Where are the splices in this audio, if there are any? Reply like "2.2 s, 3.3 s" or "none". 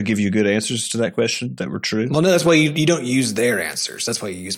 2.1 s